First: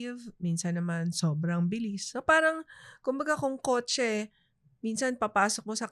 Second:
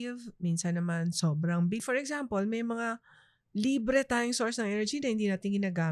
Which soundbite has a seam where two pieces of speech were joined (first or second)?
second